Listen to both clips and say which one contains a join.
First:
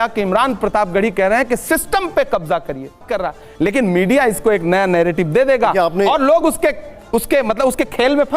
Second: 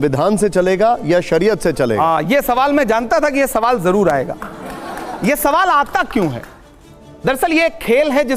first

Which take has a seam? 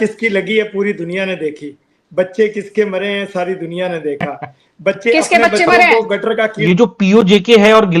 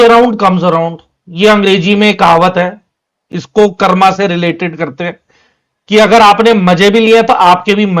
first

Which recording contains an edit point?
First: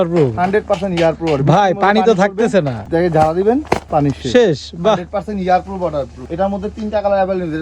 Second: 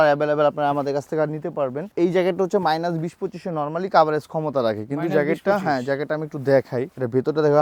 first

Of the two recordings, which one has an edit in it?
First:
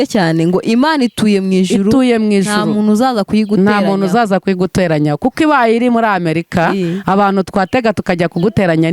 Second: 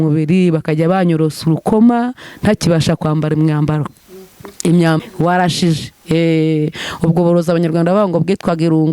second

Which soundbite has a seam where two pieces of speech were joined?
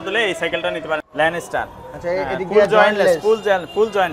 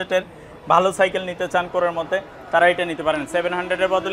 first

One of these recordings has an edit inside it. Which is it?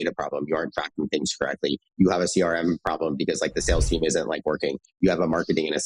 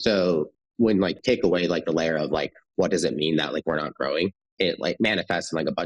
second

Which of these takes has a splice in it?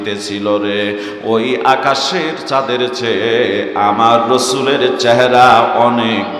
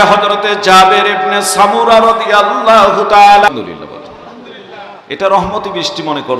second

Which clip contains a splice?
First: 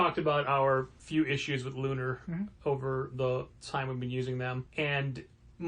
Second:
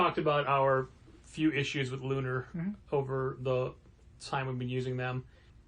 first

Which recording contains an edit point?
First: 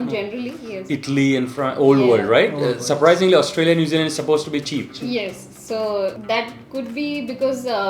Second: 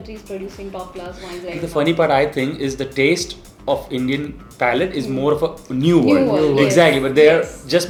first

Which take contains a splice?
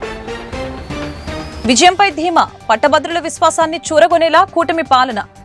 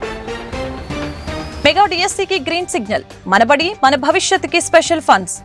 second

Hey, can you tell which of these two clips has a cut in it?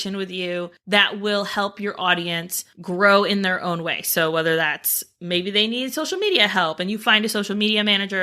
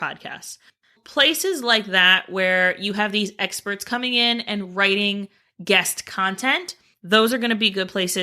second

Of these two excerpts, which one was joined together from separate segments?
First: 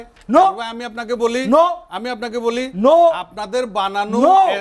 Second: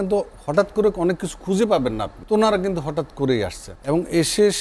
second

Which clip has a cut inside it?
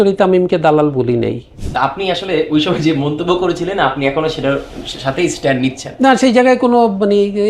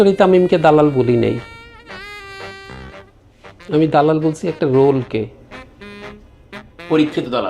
first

